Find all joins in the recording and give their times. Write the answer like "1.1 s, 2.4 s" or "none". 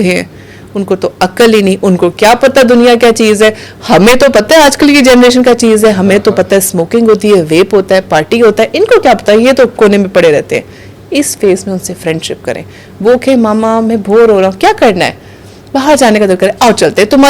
none